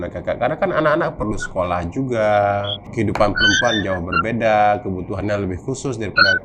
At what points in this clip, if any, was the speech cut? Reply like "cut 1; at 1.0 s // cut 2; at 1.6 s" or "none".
cut 1; at 2.8 s